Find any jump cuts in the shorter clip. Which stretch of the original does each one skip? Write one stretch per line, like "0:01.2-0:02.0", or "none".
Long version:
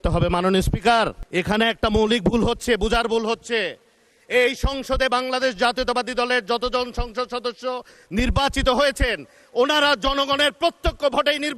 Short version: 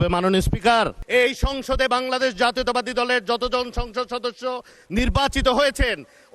0:01.2-0:04.2